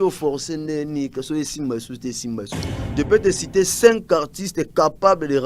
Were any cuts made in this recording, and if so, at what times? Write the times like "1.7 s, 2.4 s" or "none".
2.8 s